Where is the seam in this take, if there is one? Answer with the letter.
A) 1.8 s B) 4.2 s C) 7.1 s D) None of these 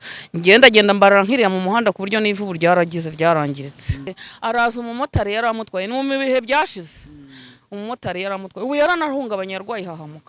B